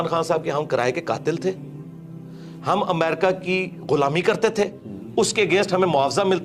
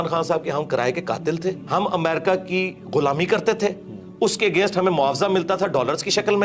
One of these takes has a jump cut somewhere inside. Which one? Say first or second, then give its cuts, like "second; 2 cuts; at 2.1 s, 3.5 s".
second; 1 cut; at 1.6 s